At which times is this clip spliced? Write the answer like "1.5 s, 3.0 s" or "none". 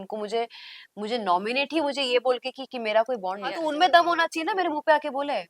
3.6 s